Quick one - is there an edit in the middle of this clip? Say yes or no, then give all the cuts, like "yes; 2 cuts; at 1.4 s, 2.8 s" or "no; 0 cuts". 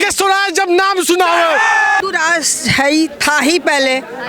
yes; 1 cut; at 2.0 s